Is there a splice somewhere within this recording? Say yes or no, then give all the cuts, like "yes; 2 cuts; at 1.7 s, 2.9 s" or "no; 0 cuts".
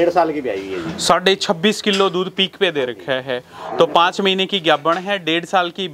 no; 0 cuts